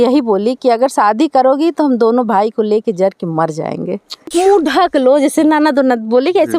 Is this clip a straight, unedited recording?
no; 1 cut; at 4.3 s

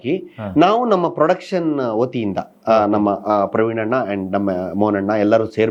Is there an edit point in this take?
no; 0 cuts

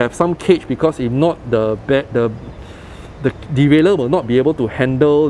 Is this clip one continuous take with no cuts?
yes; 0 cuts

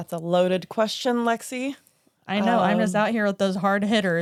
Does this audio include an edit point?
no; 0 cuts

